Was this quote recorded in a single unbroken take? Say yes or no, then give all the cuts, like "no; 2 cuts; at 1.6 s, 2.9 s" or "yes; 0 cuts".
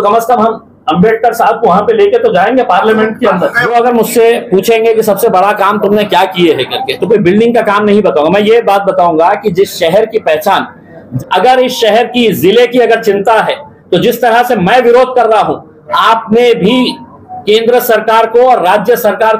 no; 2 cuts; at 3.7 s, 11.0 s